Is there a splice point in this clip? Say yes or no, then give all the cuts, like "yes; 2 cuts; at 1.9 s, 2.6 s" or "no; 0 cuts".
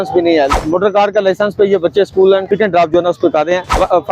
yes; 1 cut; at 2.4 s